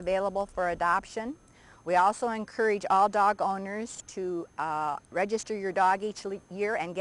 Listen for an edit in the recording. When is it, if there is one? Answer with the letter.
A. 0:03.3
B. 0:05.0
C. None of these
C